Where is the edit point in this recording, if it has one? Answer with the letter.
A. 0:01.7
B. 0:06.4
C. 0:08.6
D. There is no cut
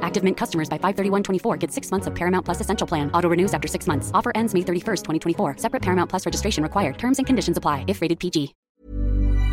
C